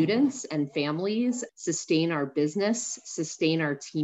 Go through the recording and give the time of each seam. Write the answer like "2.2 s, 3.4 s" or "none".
1.5 s